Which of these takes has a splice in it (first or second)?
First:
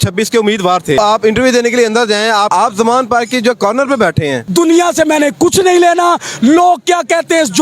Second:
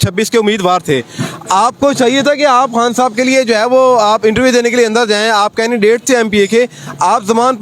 first